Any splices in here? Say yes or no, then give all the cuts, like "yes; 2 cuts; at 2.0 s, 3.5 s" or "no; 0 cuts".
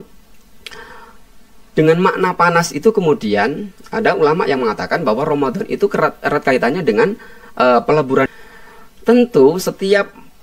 yes; 1 cut; at 8.3 s